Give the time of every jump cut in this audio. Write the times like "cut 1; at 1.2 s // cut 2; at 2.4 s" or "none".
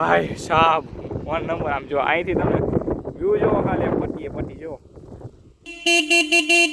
cut 1; at 5.7 s